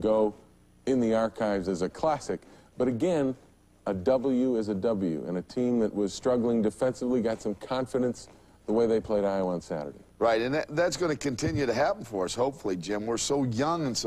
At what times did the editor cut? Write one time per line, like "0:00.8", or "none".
0:12.1